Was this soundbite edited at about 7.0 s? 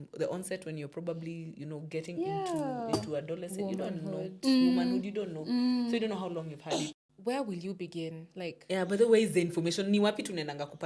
yes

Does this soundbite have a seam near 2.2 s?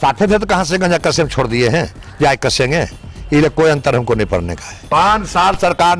no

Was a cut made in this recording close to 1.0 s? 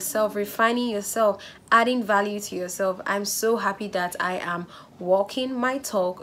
no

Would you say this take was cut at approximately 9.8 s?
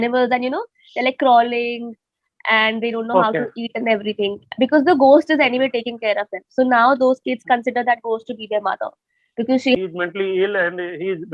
yes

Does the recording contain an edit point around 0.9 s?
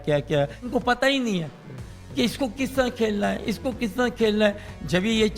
yes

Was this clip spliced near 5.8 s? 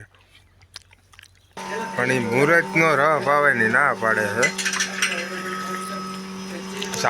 no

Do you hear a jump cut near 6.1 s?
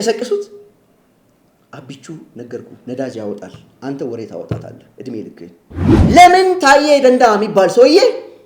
yes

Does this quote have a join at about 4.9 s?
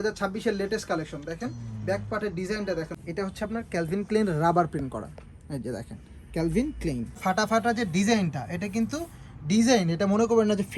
no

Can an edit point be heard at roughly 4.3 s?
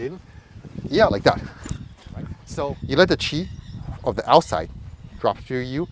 no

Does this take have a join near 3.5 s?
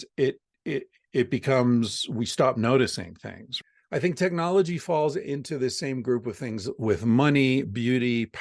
yes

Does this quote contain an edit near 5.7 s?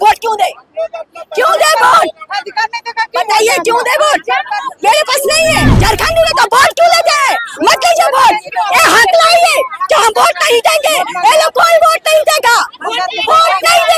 yes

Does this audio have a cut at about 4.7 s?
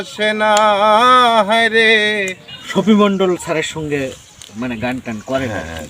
no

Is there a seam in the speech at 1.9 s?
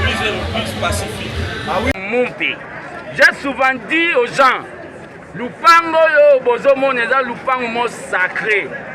yes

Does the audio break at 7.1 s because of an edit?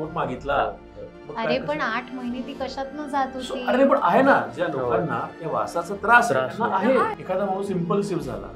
yes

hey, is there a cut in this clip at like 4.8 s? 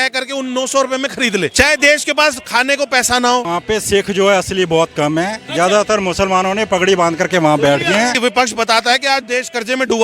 no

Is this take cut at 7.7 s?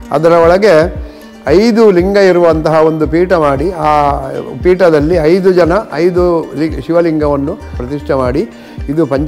yes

